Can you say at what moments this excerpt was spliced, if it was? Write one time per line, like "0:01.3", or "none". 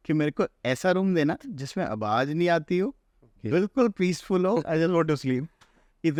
none

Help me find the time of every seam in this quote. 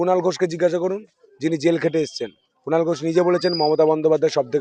none

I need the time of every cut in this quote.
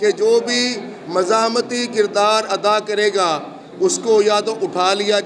none

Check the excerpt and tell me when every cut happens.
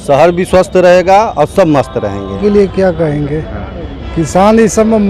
0:02.4

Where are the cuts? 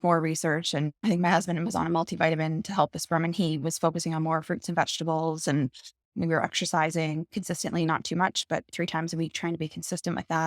0:01.0
0:06.1
0:07.3

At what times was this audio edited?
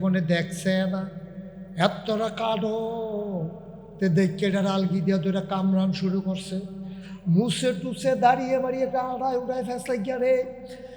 none

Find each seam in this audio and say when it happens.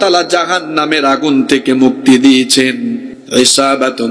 0:03.1

